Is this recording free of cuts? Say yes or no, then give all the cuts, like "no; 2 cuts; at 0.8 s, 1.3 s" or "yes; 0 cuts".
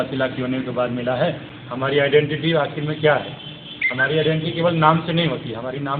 no; 1 cut; at 1.5 s